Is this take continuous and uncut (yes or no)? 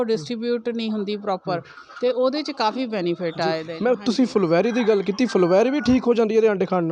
yes